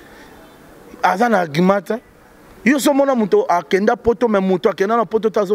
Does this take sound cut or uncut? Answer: uncut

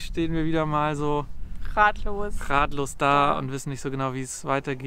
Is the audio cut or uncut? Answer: uncut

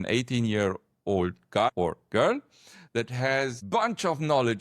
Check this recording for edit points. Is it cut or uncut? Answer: cut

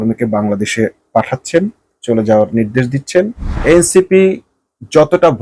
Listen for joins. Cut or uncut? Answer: cut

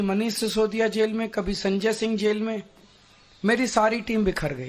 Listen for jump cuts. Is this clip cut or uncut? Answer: cut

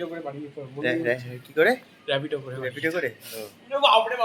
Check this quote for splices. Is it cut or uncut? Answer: uncut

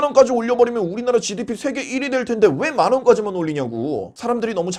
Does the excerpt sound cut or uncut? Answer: uncut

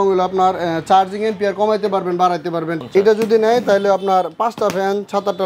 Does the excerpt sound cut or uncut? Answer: cut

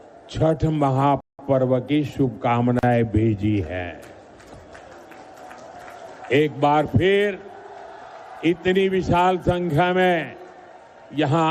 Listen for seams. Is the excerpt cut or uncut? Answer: uncut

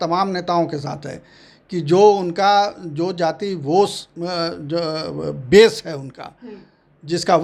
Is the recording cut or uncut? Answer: uncut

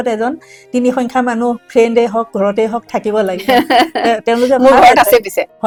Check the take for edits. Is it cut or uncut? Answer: uncut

